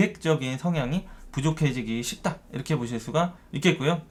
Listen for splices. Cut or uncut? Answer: uncut